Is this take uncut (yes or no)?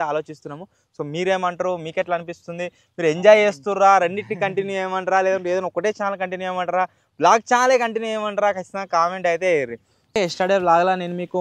no